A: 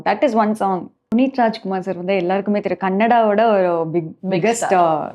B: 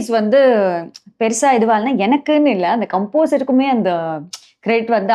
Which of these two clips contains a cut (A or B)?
A